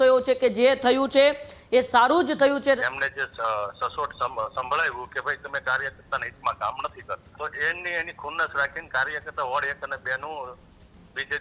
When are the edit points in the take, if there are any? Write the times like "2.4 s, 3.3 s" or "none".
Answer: 2.8 s, 7.3 s

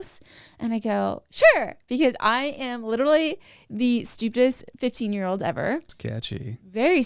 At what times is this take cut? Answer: 5.9 s

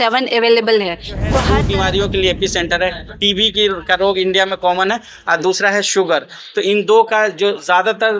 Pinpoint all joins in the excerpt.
1.4 s

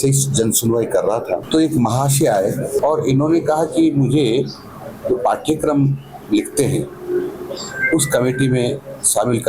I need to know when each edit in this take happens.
1.4 s, 2.8 s

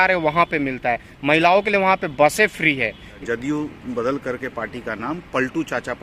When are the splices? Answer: 3.1 s

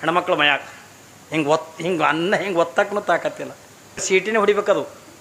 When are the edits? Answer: 4.0 s

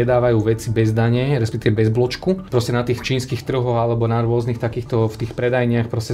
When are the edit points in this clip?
none

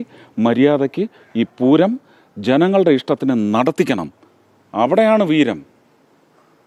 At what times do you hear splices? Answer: none

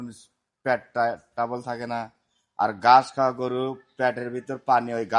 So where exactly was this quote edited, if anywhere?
none

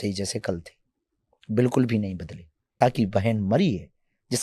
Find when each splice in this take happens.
2.8 s

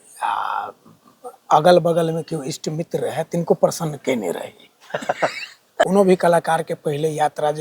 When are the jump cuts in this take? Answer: 5.8 s

